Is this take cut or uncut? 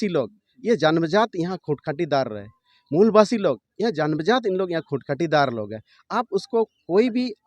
uncut